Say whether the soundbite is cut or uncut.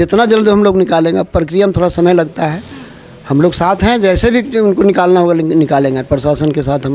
uncut